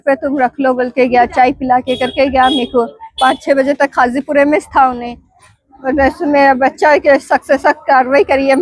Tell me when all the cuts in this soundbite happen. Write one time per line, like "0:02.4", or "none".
none